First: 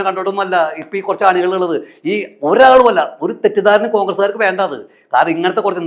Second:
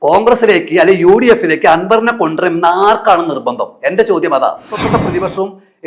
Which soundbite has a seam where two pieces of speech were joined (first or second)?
second